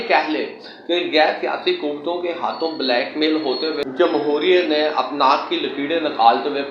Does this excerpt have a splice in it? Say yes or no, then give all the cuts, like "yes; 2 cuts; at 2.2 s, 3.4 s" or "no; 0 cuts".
no; 0 cuts